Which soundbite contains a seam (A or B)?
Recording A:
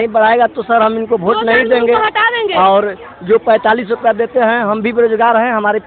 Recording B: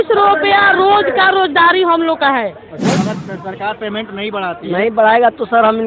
B